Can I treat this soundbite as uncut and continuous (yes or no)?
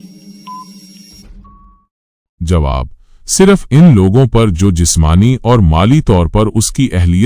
no